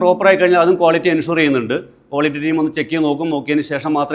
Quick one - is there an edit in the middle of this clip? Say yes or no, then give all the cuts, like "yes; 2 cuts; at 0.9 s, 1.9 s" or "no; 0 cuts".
no; 0 cuts